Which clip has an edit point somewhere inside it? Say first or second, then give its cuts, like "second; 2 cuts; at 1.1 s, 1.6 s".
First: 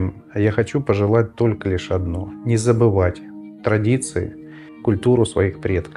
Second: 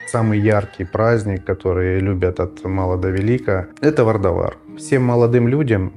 second; 2 cuts; at 3.7 s, 4.7 s